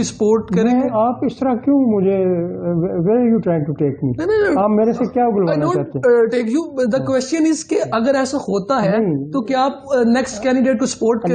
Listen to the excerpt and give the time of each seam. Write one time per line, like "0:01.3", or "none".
none